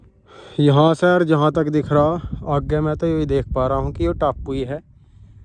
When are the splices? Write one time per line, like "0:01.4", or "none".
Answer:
none